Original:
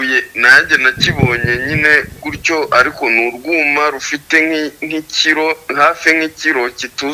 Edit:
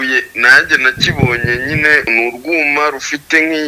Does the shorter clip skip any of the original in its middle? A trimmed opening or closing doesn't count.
yes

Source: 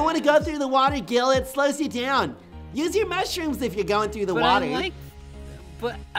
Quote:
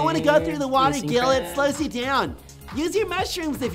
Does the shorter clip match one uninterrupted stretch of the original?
yes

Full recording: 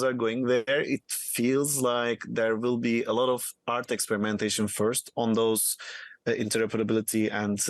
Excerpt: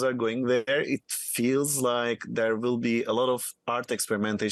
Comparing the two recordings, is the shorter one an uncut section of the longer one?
yes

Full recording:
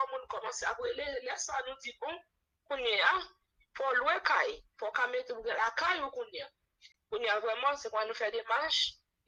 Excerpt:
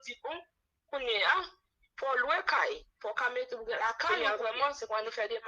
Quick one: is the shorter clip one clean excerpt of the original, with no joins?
no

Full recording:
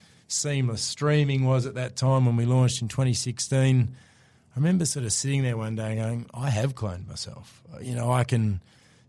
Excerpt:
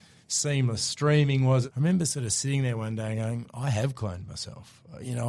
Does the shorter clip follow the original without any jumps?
no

